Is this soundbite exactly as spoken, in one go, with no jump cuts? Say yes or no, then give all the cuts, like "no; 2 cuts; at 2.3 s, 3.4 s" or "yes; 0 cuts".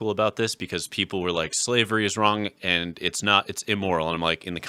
yes; 0 cuts